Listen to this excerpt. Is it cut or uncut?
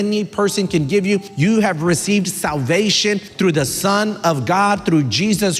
cut